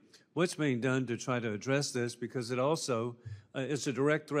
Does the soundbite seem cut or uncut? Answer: cut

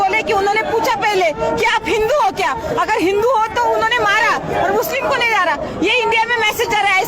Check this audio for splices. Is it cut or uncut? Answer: uncut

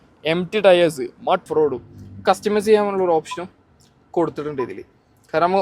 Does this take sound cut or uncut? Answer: cut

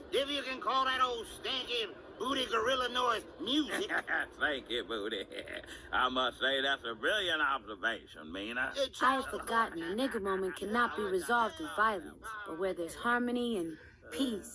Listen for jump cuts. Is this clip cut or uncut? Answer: cut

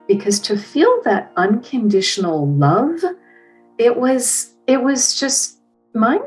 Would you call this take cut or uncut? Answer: uncut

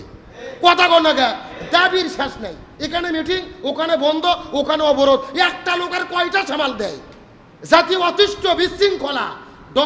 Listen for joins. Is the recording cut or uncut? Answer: uncut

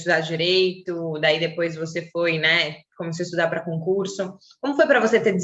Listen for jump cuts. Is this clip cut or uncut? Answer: uncut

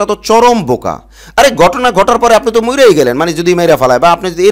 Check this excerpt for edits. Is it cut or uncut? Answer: uncut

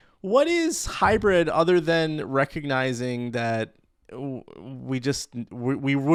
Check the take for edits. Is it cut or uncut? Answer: uncut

